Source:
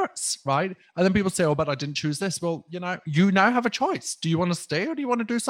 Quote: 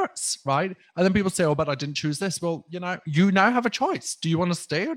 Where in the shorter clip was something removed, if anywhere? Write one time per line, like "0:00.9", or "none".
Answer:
none